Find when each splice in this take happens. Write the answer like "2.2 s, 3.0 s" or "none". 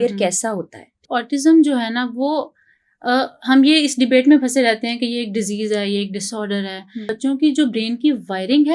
1.0 s, 7.1 s